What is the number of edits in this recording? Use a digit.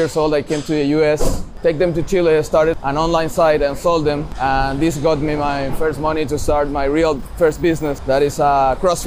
4